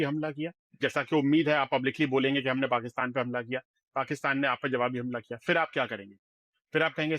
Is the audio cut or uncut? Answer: uncut